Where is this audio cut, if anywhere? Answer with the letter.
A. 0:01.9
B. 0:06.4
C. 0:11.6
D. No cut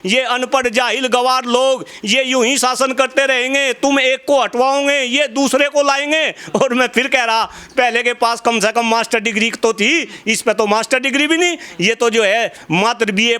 D